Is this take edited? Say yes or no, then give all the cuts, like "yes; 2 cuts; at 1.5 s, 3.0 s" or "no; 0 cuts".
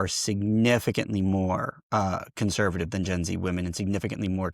no; 0 cuts